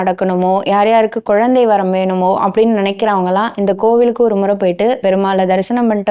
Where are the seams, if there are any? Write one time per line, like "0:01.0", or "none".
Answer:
0:05.0